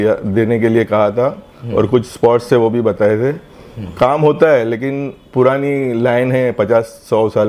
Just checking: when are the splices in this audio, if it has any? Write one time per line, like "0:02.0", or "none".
none